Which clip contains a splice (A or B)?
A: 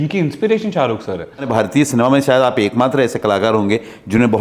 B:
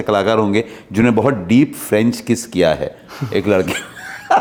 A